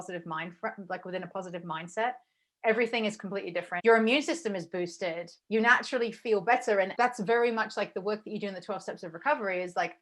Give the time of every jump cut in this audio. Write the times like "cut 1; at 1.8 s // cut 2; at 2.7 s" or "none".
cut 1; at 3.7 s // cut 2; at 5.3 s // cut 3; at 6.9 s